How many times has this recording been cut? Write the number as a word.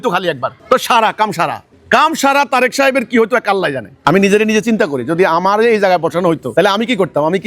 two